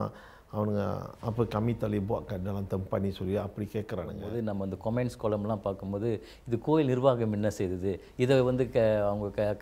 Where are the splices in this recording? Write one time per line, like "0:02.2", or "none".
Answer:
0:04.3